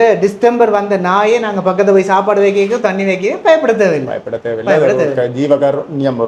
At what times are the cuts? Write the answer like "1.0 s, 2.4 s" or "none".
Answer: none